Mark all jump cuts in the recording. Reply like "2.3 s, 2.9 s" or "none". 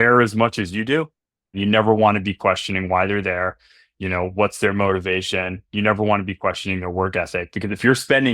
1.5 s